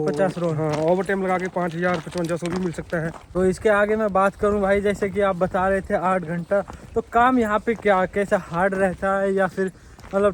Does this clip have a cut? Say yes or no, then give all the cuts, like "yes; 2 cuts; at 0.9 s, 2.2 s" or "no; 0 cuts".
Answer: no; 0 cuts